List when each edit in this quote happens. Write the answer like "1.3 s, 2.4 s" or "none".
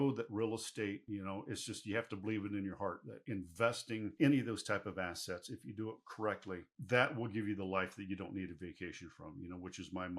1.0 s, 3.1 s